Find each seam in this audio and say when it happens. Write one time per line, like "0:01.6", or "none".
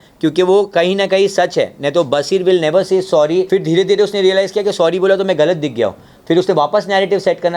0:03.5